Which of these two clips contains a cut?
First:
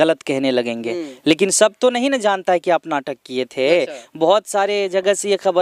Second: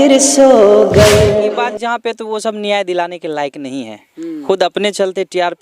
second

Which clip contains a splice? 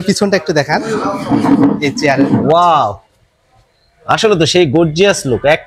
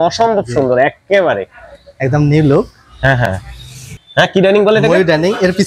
second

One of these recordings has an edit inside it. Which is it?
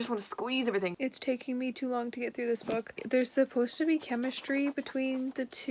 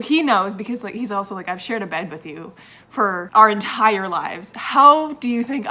first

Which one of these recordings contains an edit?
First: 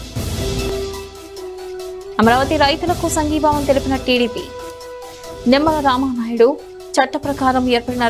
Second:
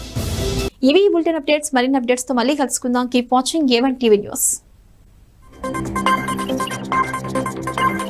first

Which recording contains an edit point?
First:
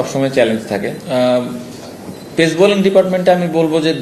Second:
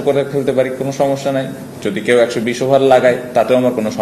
first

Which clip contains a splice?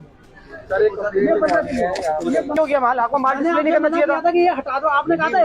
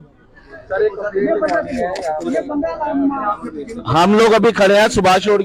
first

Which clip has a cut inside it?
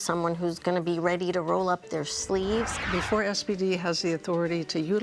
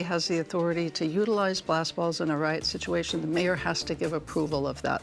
first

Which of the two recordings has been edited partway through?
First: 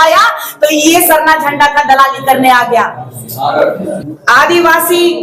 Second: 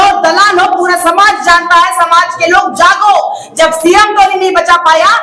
first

